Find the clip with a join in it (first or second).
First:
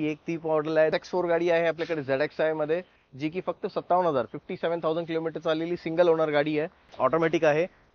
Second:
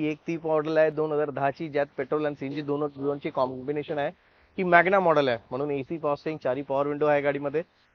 first